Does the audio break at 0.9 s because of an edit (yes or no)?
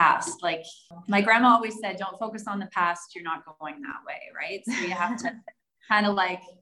yes